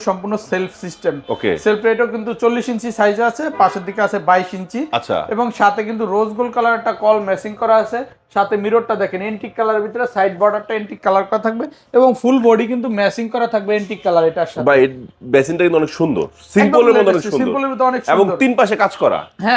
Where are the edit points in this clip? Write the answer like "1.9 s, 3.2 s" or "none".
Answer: none

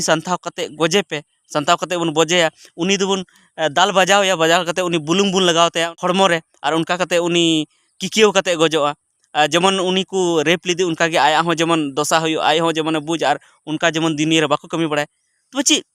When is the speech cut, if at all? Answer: 5.9 s

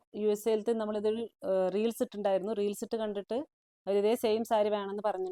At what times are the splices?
none

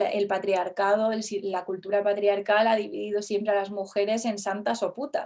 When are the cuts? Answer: none

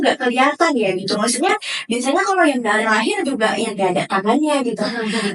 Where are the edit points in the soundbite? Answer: none

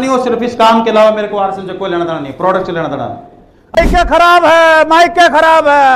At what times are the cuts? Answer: 3.7 s

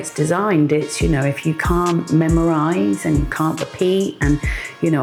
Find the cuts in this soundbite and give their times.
none

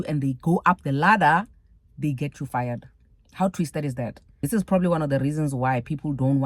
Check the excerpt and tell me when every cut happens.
4.3 s

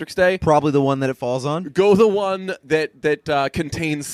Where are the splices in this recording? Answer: none

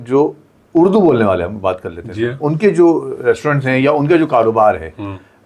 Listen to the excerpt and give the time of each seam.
none

